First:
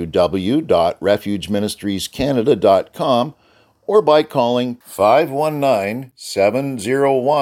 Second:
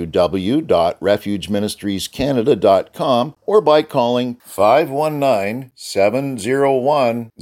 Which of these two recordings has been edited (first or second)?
second